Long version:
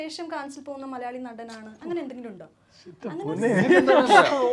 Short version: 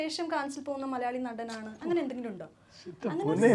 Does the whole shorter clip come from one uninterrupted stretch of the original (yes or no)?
yes